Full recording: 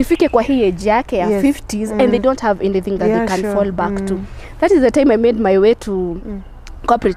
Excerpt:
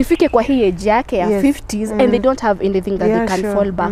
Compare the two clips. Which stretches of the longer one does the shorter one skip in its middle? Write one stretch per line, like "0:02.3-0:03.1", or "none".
none

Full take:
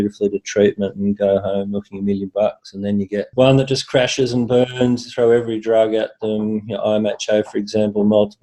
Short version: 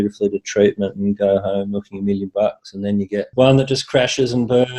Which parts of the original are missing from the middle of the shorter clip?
none

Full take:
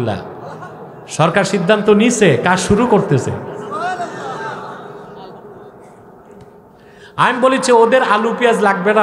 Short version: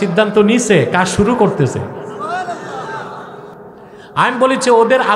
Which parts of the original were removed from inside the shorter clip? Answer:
0:05.6-0:07.1

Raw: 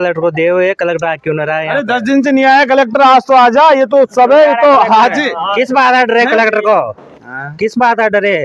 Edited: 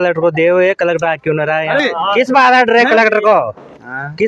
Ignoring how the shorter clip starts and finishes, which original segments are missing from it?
0:01.8-0:05.2

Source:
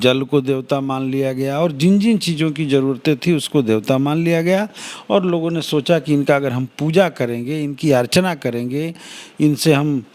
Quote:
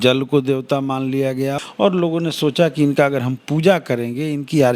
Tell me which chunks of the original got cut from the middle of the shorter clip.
0:01.5-0:04.8

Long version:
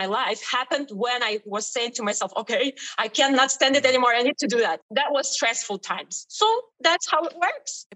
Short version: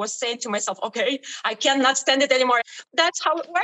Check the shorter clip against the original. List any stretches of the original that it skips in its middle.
0:04.2-0:06.6

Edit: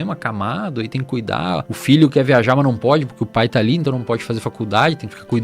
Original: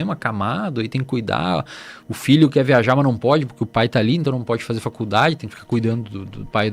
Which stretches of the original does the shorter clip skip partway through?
0:01.7-0:02.1

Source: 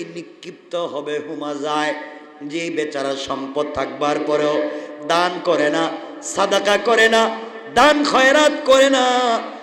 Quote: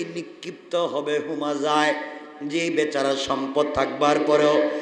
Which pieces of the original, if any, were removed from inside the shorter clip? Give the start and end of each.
none

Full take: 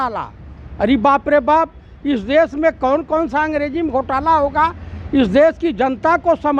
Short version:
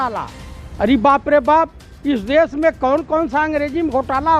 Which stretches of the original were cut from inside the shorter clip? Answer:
none

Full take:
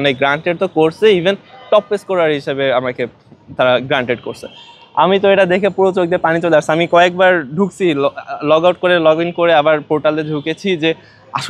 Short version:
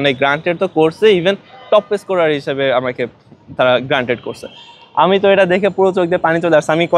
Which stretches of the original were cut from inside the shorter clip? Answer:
none

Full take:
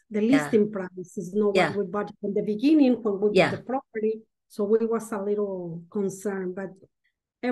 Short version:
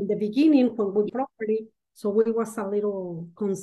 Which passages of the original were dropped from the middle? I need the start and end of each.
0:03.3-0:03.6

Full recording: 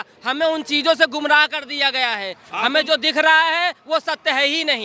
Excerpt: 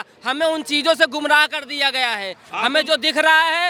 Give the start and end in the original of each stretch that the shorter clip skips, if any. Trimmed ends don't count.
none

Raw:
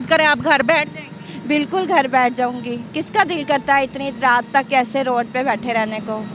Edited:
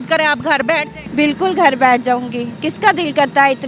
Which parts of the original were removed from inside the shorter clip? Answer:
0:01.0-0:01.3

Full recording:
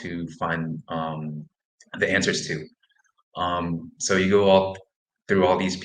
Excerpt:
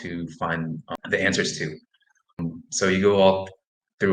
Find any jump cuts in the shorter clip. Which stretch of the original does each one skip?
0:00.9-0:01.8
0:03.3-0:03.7

